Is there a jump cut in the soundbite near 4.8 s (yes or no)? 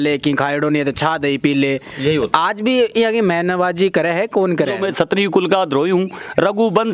yes